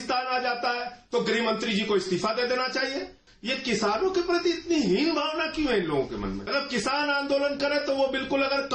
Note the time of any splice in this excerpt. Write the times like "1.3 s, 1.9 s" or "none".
3.2 s, 6.4 s